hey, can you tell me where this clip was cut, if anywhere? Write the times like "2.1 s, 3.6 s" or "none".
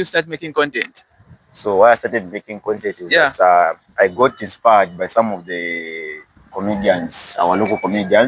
none